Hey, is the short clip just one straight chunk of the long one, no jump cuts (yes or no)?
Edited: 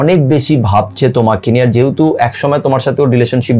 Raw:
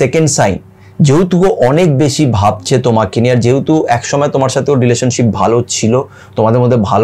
yes